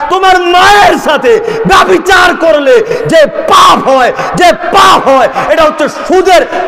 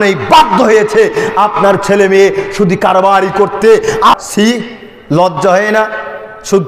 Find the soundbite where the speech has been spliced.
second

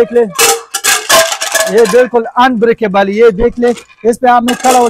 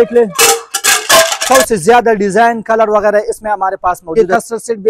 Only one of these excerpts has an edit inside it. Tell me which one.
second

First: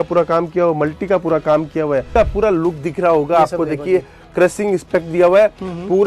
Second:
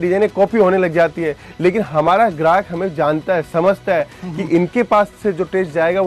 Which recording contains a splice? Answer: first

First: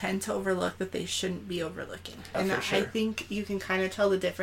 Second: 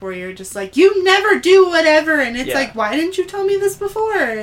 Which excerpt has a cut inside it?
first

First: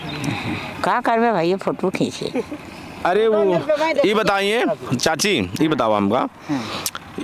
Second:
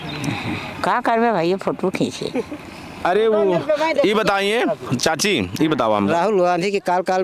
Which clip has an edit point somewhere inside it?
second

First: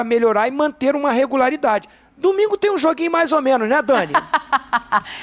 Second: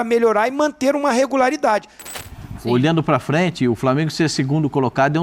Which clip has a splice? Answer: second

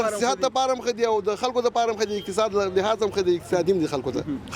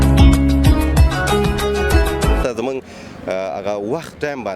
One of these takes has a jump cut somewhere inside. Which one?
second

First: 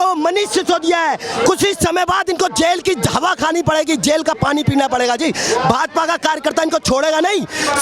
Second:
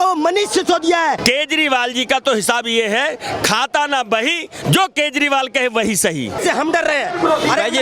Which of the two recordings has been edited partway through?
second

